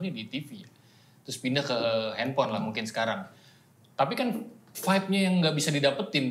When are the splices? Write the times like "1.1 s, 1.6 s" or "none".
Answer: none